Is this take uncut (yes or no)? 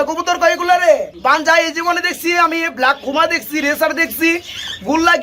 no